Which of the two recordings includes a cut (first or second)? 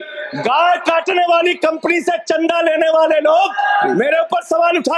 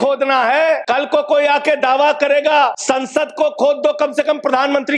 second